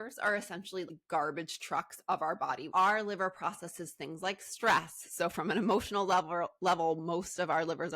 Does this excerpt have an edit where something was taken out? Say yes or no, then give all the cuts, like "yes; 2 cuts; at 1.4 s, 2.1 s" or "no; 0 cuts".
yes; 2 cuts; at 1.0 s, 2.6 s